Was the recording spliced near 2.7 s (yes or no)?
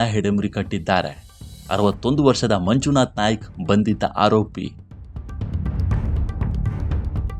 no